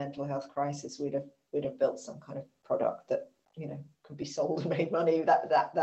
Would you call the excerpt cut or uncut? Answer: uncut